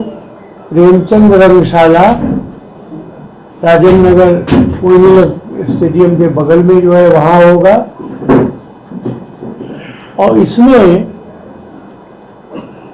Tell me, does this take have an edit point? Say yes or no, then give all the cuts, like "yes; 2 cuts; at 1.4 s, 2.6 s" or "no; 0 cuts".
no; 0 cuts